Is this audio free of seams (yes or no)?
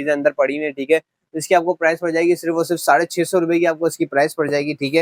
yes